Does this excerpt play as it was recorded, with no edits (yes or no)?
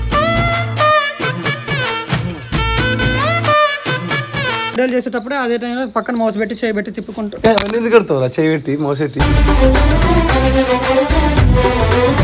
no